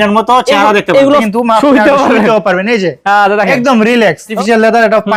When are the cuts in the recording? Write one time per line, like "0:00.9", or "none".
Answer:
0:01.2
0:04.3